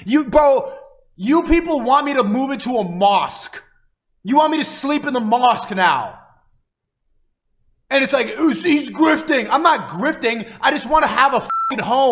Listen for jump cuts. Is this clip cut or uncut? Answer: uncut